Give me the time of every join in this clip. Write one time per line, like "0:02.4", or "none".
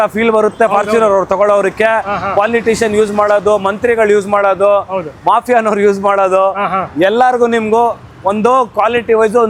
none